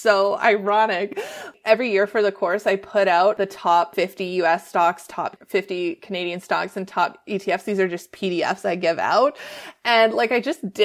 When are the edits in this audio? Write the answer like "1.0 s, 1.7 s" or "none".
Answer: 1.4 s, 3.8 s, 5.4 s